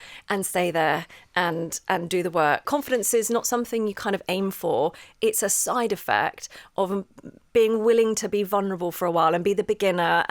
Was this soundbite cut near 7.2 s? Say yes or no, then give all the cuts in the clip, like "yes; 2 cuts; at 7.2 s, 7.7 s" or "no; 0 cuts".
no; 1 cut; at 2.6 s